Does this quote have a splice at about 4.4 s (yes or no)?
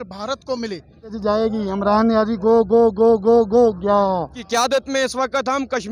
yes